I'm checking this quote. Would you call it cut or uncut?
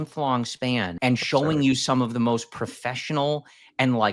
cut